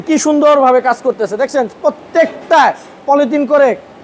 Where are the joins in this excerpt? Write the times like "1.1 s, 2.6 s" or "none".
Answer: none